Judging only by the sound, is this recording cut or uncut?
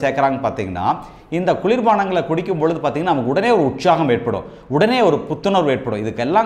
uncut